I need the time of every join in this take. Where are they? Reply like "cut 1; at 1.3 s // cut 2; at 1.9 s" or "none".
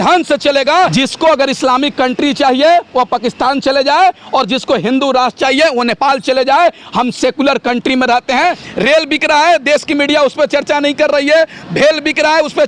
cut 1; at 0.9 s // cut 2; at 8.6 s